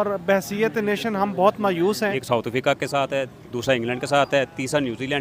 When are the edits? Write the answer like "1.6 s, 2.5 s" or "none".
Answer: 2.2 s